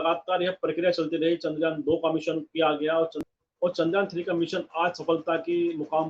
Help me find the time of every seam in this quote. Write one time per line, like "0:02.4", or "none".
0:03.2

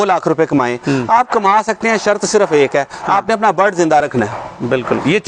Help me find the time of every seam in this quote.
none

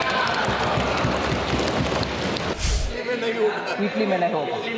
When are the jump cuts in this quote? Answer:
0:02.5

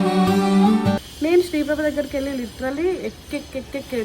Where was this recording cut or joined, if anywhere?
0:01.1

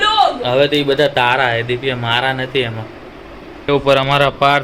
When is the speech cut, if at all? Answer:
0:03.7

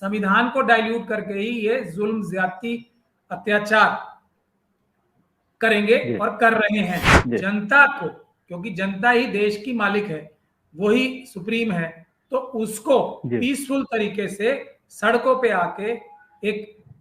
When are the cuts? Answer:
0:07.1

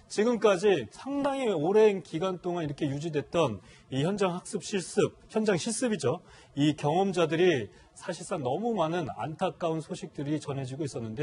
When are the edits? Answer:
0:03.6

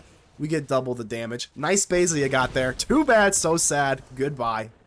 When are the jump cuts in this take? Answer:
none

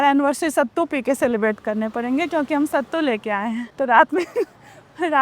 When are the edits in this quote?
0:03.7

